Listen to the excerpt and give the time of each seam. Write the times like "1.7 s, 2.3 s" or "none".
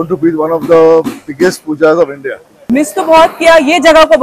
2.5 s